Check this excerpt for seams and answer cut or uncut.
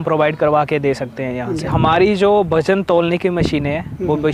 cut